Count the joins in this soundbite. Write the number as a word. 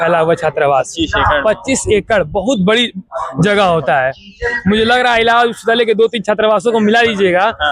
zero